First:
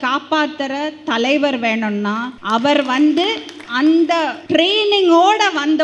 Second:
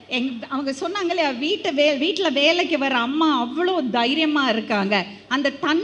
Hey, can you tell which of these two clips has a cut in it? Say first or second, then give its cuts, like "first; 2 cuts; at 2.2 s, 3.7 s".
first; 3 cuts; at 2.3 s, 3.6 s, 4.4 s